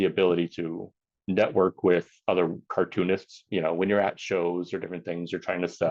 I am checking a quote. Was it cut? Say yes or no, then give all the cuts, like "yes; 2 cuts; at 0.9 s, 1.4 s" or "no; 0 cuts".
yes; 1 cut; at 3.4 s